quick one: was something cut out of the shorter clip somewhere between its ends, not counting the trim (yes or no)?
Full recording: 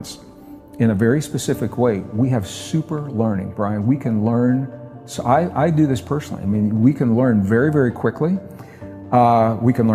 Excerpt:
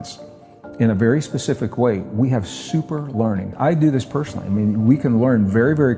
yes